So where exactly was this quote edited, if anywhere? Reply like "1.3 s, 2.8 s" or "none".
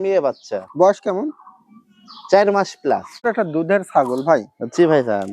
3.2 s